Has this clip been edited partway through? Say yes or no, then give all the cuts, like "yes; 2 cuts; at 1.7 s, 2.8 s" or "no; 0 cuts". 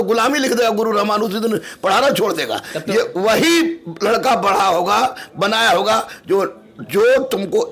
no; 0 cuts